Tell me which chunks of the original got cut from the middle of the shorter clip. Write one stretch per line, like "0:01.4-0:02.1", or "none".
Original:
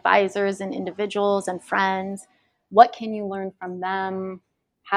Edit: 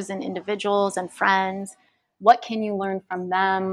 none